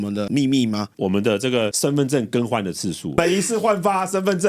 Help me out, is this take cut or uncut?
cut